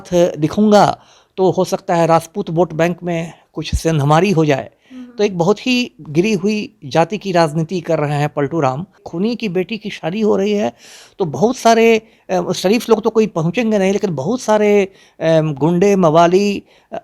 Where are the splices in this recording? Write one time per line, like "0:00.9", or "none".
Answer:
0:09.1